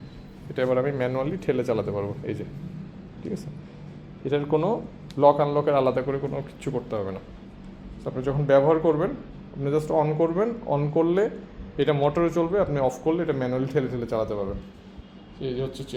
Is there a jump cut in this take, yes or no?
no